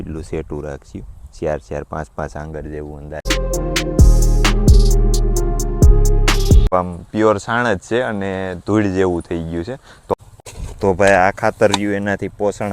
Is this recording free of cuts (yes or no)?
no